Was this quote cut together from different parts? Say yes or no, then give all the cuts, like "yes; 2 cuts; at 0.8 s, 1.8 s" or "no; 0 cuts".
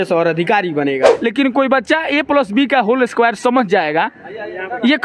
yes; 1 cut; at 1.1 s